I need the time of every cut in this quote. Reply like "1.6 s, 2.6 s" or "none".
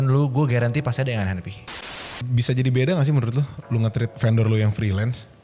1.6 s, 4.1 s

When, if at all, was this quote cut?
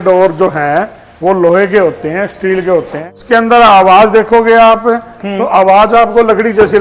3.2 s

